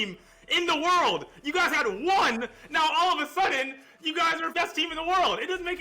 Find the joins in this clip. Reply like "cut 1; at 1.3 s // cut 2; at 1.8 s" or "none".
cut 1; at 4.5 s